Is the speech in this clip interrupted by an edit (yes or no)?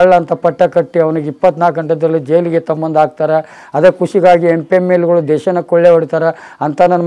no